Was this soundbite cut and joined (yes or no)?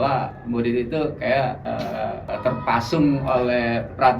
yes